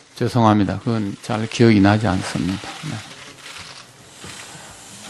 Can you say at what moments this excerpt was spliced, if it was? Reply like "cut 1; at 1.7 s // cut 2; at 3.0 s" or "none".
cut 1; at 3.6 s